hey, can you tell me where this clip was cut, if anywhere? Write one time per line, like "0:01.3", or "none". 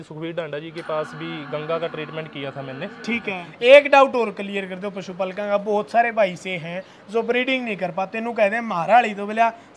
0:03.4